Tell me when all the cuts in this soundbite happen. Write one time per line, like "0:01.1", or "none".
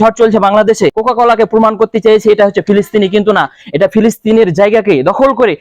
0:01.0

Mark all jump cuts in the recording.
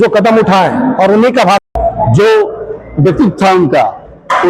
0:01.6

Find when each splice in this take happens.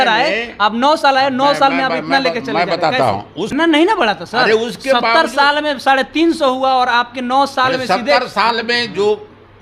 0:03.6

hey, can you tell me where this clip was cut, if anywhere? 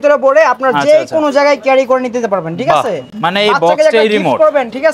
none

